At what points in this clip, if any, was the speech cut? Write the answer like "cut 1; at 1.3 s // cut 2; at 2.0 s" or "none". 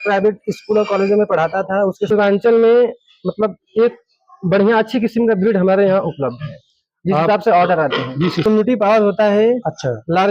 cut 1; at 2.1 s // cut 2; at 8.4 s